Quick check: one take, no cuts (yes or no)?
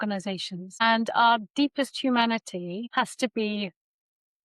yes